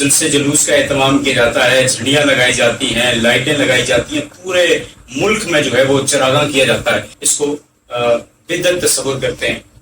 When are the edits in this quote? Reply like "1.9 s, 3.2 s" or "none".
7.2 s